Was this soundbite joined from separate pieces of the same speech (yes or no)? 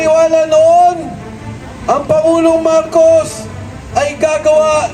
no